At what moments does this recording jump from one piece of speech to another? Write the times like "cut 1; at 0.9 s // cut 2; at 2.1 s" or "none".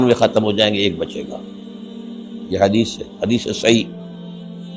cut 1; at 3.9 s